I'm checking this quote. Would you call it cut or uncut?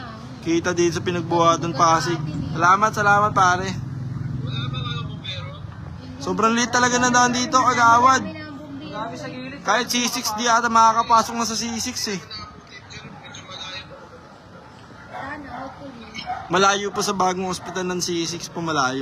uncut